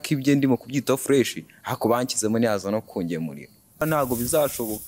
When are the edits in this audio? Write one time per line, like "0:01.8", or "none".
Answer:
0:03.8